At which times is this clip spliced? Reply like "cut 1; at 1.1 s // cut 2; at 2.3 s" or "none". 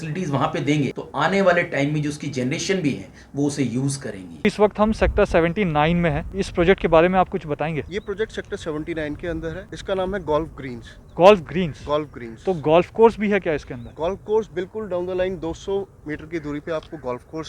cut 1; at 1.0 s // cut 2; at 4.4 s // cut 3; at 6.3 s // cut 4; at 7.9 s // cut 5; at 9.7 s